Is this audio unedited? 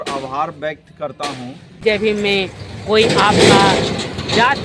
no; 1 cut; at 1.8 s

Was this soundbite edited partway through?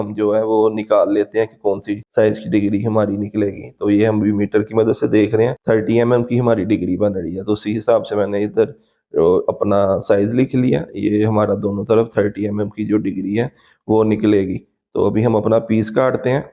no; 0 cuts

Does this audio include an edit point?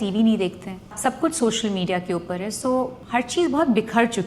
yes; 2 cuts; at 0.9 s, 3.0 s

